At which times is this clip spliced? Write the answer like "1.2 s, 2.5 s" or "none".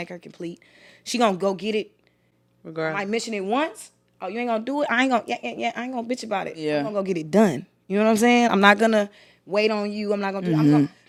none